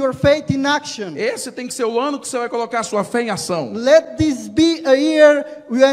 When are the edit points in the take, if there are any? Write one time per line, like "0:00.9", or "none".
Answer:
none